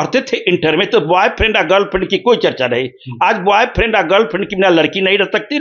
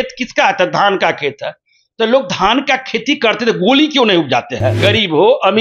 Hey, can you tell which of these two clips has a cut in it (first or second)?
second